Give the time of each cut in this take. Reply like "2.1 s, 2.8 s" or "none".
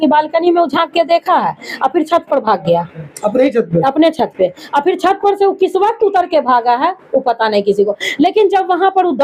none